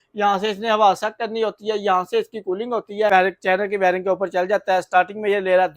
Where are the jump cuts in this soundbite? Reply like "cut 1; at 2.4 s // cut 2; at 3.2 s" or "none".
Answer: cut 1; at 3.1 s